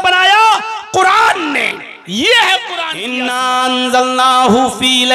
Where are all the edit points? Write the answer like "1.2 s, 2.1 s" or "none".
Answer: 3.0 s